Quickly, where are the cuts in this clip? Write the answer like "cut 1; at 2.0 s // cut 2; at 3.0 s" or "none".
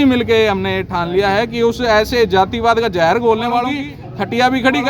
cut 1; at 3.7 s